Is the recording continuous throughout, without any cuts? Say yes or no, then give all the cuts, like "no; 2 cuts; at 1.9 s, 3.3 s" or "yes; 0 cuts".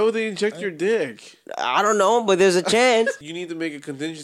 no; 1 cut; at 3.3 s